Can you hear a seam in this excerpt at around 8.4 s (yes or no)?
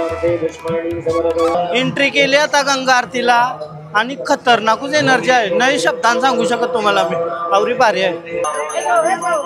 yes